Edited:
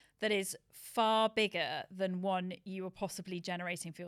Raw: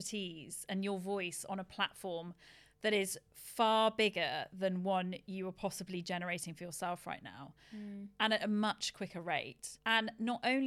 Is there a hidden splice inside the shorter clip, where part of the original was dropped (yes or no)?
no